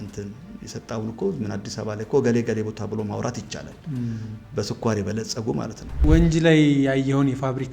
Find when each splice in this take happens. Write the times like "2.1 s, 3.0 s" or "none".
6.0 s

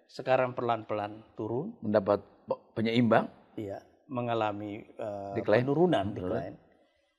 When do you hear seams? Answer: none

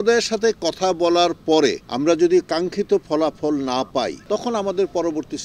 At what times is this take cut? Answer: 1.9 s, 4.2 s

